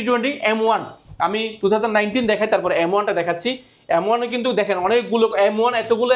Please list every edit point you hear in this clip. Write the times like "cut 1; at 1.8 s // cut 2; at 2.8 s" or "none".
none